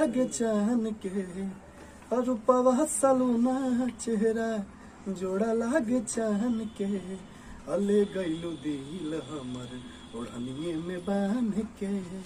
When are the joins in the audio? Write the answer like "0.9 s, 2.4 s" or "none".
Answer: none